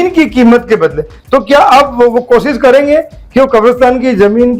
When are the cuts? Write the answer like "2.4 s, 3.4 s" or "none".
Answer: 1.1 s

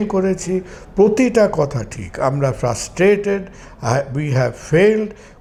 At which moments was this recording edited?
none

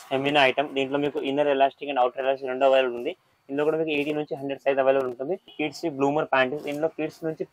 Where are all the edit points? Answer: 5.5 s

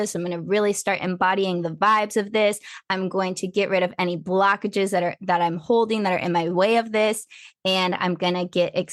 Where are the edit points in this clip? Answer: none

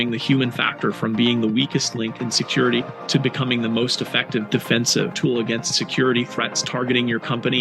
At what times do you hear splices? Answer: none

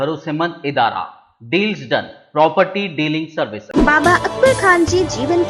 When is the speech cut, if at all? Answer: 3.6 s

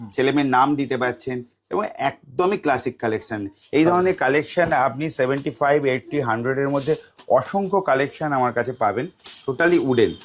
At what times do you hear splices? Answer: none

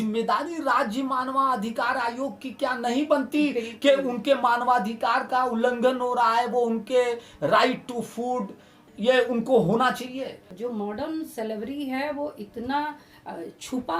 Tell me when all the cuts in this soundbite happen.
8.8 s, 10.5 s

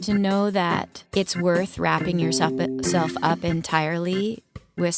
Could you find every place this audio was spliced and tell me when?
0.9 s

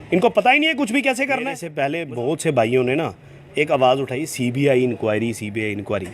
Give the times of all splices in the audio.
1.6 s

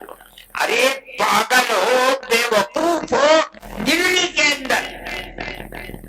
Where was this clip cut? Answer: 3.6 s

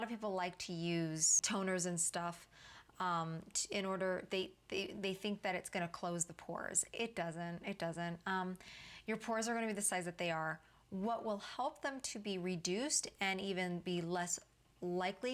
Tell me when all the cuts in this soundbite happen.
1.4 s

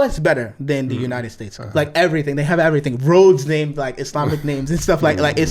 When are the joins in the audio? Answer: 1.4 s

